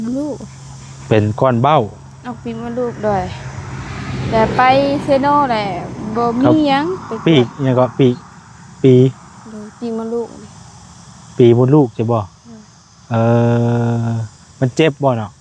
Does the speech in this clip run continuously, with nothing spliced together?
yes; 0 cuts

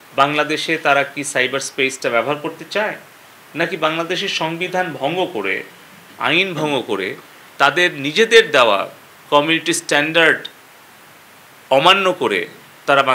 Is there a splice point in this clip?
no; 0 cuts

